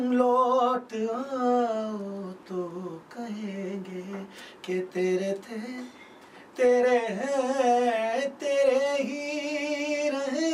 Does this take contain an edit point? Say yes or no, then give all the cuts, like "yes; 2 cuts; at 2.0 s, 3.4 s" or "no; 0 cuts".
no; 0 cuts